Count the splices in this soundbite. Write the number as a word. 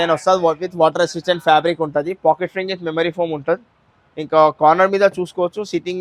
zero